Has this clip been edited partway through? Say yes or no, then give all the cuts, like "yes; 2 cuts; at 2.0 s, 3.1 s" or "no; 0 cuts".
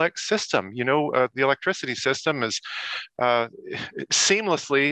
no; 0 cuts